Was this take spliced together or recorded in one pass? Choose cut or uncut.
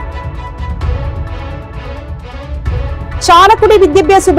uncut